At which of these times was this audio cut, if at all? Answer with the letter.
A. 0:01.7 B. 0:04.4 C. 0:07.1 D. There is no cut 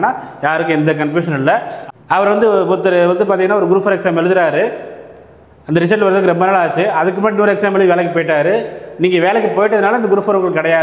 A